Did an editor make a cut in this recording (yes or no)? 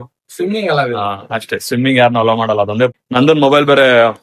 yes